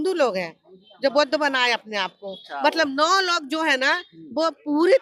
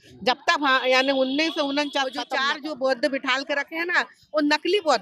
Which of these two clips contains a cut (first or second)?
second